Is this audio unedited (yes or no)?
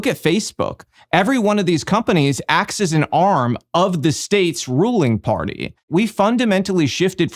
no